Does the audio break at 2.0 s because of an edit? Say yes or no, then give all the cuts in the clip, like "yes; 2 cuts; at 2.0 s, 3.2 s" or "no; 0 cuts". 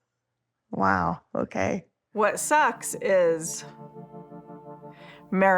yes; 1 cut; at 2.0 s